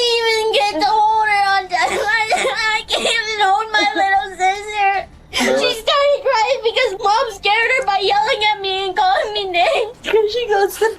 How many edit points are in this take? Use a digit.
1